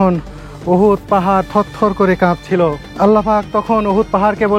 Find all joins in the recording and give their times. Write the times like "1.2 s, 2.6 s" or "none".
2.8 s